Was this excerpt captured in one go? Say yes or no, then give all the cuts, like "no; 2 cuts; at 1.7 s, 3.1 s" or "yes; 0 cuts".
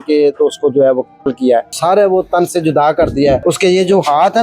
no; 2 cuts; at 1.7 s, 3.4 s